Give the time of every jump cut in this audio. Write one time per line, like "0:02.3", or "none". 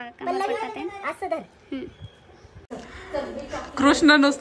0:02.7